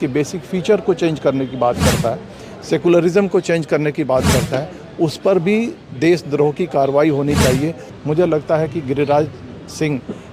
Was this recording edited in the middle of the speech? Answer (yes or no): yes